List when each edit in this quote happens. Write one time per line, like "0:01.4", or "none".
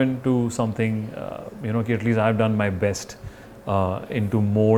none